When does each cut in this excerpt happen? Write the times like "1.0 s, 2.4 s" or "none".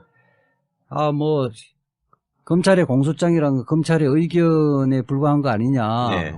4.4 s